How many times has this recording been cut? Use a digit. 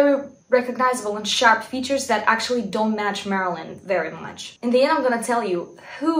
1